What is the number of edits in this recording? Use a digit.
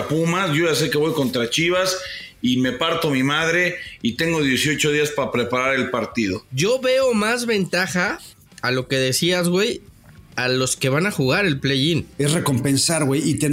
2